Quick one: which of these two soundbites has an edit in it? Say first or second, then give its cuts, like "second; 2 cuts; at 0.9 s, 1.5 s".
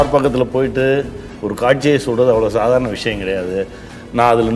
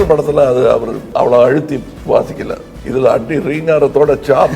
second; 3 cuts; at 1.0 s, 1.9 s, 2.7 s